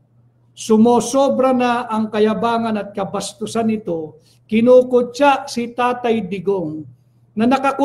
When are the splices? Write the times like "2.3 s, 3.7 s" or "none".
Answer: none